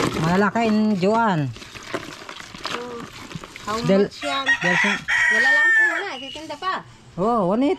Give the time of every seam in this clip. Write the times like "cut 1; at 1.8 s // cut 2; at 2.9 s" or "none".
none